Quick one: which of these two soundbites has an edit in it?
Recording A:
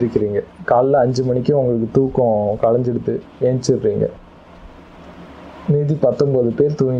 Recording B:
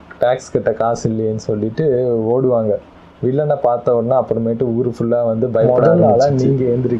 B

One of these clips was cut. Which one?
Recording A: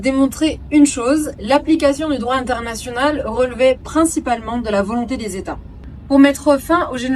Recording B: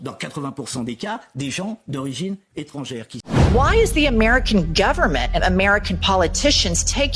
B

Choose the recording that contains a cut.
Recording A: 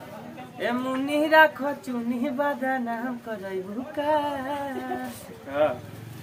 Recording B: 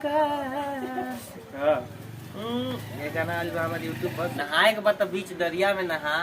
B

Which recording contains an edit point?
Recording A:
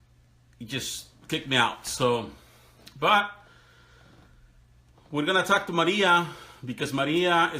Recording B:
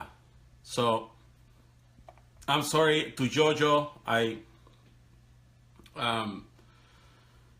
A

